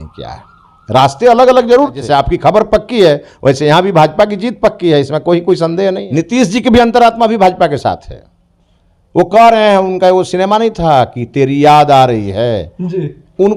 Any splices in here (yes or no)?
yes